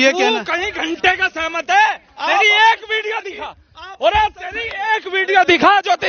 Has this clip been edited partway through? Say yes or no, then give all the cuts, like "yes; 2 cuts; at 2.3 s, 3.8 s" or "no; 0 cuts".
no; 0 cuts